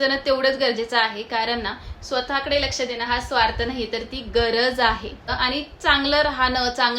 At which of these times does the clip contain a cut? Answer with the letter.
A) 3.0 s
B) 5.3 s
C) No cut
B